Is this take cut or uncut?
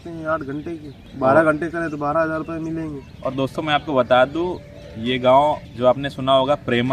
cut